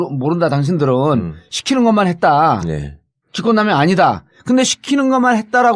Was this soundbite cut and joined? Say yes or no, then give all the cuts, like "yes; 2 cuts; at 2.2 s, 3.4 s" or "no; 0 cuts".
yes; 1 cut; at 4.3 s